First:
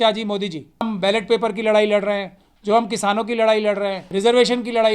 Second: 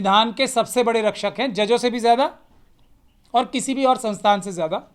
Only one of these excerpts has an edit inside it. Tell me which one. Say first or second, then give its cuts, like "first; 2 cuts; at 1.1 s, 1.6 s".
first; 2 cuts; at 0.9 s, 4.0 s